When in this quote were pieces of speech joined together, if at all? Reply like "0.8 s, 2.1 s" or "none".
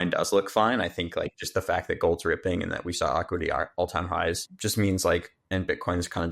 4.5 s